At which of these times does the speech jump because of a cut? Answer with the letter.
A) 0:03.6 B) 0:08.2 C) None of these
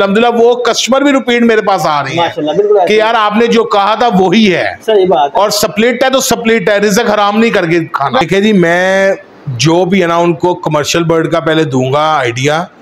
B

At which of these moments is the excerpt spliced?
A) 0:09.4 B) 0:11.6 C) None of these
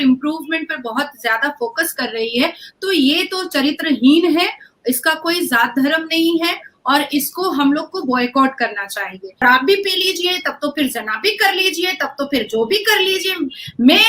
A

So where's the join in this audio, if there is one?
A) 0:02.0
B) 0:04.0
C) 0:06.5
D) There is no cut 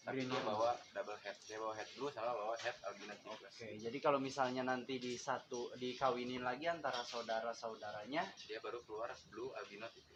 D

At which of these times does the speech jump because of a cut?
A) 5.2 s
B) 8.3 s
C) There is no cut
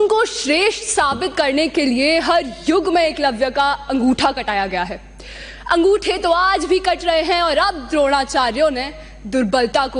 C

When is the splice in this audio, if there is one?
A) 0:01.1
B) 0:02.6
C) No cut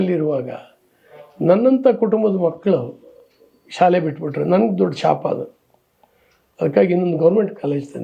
C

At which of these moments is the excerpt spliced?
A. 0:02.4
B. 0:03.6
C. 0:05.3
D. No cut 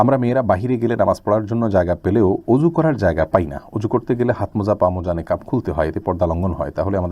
D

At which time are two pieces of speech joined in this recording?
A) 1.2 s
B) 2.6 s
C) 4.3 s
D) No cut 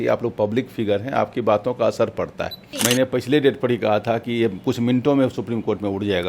B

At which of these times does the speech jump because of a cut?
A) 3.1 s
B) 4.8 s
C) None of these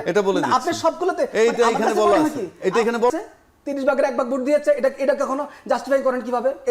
A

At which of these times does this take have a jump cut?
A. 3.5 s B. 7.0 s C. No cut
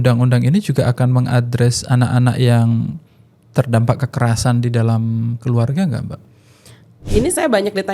B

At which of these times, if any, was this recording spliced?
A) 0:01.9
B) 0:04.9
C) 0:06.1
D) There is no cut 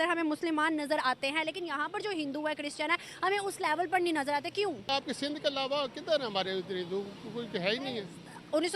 B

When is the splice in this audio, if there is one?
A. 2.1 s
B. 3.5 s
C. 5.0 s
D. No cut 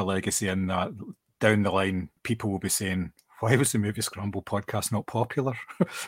A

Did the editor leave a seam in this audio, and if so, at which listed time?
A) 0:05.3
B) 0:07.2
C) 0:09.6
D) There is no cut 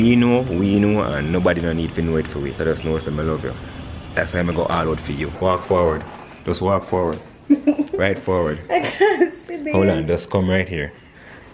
A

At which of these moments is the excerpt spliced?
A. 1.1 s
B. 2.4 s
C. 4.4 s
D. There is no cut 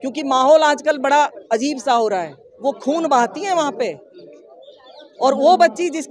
B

